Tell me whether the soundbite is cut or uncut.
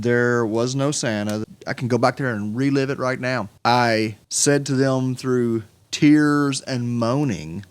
cut